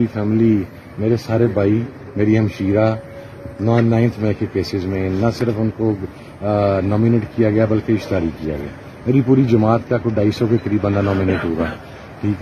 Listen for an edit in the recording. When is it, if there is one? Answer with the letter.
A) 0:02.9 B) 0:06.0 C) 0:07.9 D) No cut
D